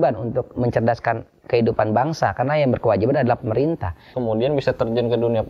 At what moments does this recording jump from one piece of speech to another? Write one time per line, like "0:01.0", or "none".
0:04.1